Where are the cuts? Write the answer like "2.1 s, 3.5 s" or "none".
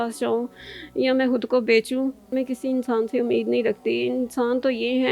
2.3 s